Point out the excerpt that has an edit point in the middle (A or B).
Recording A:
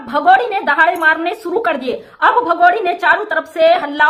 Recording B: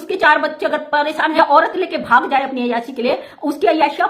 B